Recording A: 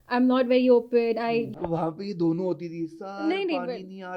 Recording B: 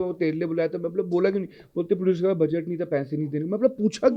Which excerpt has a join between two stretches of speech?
A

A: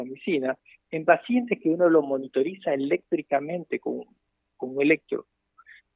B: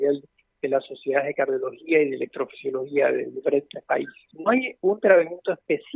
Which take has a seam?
B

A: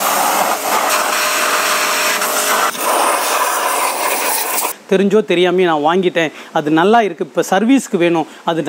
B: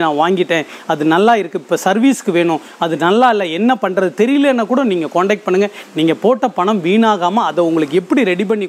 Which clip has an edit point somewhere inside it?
A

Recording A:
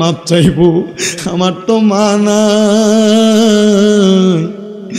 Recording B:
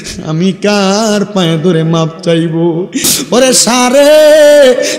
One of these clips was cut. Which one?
B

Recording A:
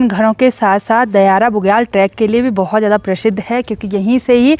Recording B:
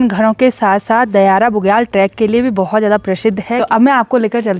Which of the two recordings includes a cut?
B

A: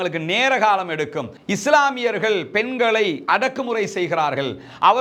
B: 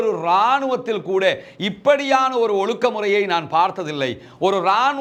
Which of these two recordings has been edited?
A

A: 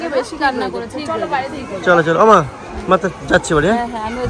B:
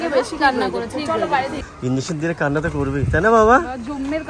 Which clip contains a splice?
B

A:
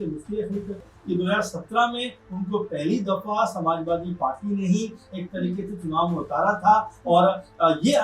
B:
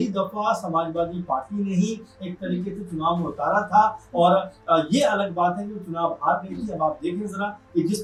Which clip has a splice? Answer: A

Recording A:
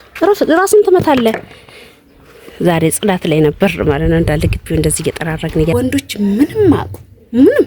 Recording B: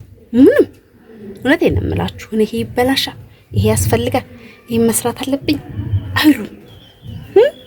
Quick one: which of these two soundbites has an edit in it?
A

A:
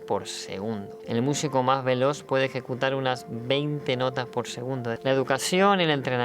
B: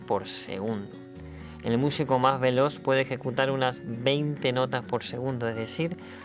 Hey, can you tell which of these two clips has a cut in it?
A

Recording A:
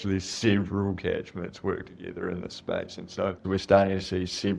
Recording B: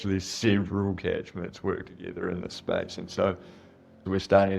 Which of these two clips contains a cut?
A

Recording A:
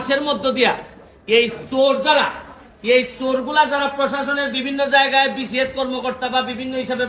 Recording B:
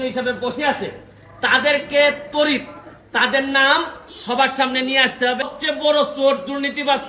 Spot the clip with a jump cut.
B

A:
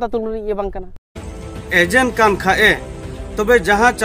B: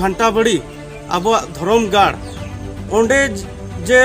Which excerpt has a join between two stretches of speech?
A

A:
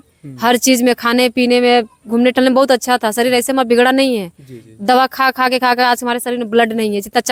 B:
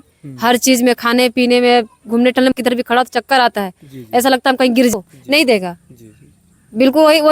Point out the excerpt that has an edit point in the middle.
B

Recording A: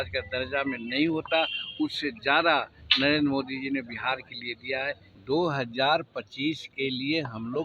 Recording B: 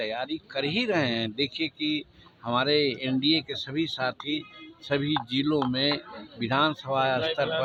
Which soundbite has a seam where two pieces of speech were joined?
A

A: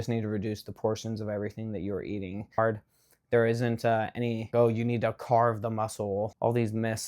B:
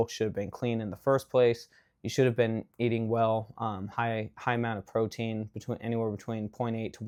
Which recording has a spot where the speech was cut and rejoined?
A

